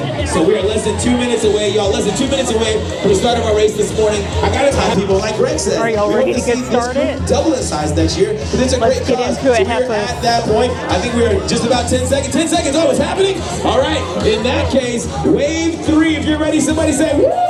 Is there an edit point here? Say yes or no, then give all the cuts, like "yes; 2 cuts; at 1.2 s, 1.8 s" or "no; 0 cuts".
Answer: no; 0 cuts